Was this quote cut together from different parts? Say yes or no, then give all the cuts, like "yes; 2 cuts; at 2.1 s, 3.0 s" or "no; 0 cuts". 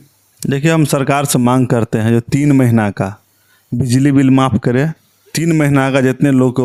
no; 0 cuts